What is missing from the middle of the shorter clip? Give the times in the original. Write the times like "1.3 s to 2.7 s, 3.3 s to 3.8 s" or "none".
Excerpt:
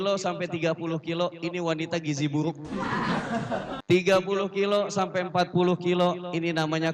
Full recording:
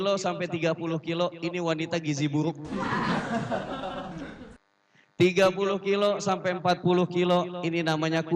3.8 s to 5.1 s